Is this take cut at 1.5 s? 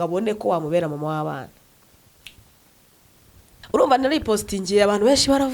no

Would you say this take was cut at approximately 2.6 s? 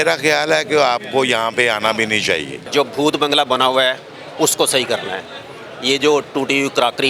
yes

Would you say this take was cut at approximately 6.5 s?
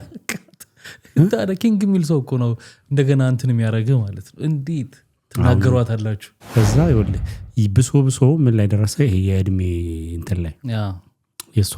yes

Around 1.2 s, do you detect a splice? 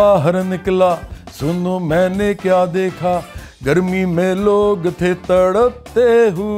no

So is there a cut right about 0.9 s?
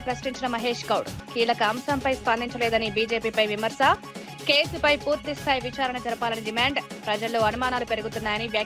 no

